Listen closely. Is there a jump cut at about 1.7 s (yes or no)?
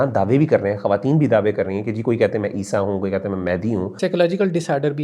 no